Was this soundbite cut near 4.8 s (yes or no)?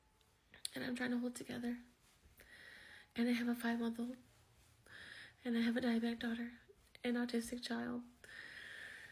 no